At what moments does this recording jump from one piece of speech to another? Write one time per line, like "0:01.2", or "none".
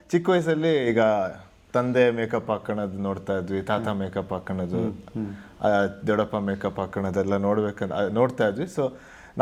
none